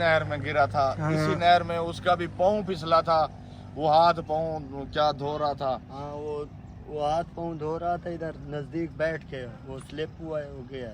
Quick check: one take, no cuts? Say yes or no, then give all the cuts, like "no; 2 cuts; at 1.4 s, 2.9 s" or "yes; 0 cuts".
yes; 0 cuts